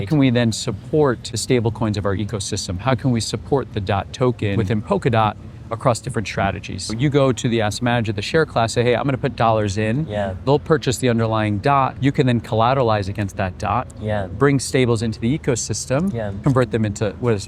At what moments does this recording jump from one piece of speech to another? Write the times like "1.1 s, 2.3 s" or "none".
1.3 s, 4.6 s, 6.9 s, 11.9 s, 16.3 s